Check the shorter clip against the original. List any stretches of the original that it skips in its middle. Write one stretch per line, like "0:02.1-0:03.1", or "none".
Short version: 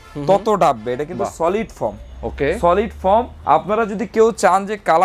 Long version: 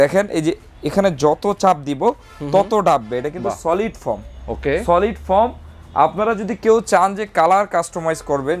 0:05.6-0:05.8